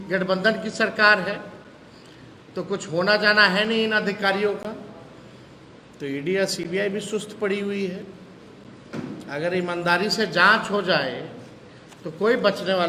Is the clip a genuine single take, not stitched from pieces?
yes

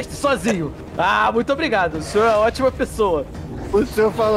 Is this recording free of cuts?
yes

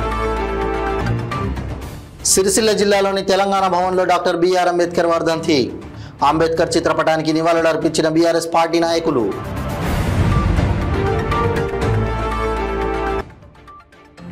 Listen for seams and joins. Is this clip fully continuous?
no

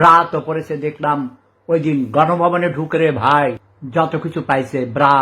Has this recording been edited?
yes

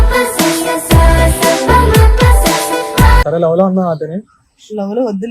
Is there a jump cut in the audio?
yes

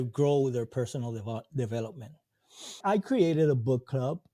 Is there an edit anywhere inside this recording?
yes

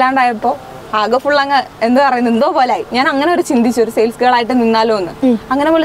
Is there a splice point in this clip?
yes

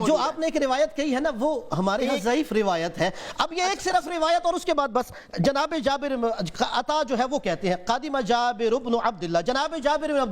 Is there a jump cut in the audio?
no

